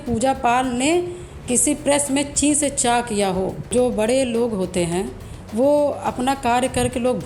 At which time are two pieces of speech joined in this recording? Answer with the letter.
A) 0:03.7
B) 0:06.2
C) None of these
A